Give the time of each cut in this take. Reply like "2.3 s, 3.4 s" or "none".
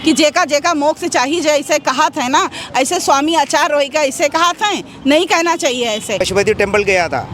6.3 s